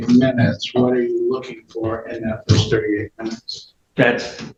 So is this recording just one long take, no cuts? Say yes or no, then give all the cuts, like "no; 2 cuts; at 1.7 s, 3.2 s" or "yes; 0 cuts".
yes; 0 cuts